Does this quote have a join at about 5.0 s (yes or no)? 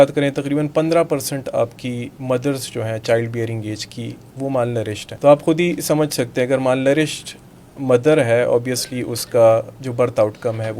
yes